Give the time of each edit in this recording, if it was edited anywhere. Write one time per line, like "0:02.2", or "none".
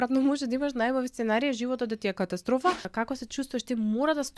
0:02.9